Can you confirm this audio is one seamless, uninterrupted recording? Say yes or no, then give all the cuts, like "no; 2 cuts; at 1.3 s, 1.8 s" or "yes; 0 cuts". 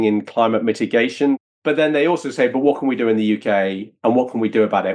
no; 1 cut; at 1.4 s